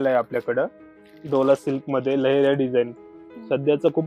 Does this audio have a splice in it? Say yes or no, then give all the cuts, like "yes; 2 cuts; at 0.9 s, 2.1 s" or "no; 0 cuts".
no; 0 cuts